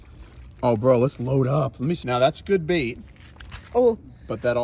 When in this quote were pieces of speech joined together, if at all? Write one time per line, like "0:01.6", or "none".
0:02.0